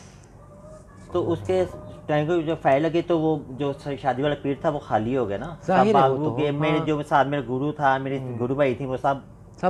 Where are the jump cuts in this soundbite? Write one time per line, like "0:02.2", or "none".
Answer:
none